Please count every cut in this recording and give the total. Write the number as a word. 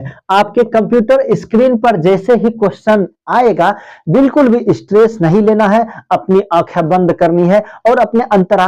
zero